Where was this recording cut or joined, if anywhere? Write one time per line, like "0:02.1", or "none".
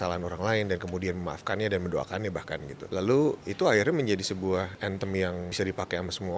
0:02.8
0:03.4
0:04.7
0:05.5